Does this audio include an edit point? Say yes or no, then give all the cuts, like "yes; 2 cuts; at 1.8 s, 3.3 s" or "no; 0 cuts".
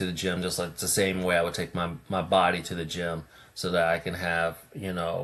no; 0 cuts